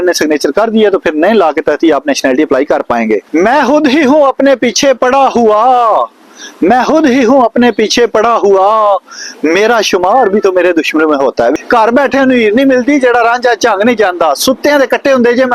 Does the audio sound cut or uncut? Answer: cut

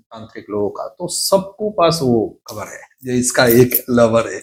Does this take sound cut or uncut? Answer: uncut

